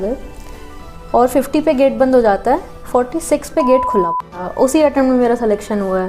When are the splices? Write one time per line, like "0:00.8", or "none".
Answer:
0:04.4